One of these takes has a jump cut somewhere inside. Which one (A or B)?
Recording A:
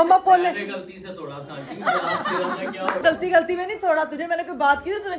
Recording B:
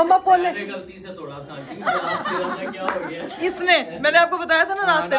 A